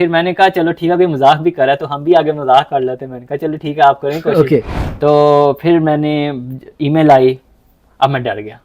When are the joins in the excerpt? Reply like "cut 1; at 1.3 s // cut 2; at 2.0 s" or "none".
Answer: cut 1; at 4.8 s